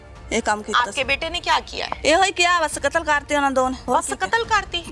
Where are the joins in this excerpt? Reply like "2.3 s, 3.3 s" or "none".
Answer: 1.8 s, 3.8 s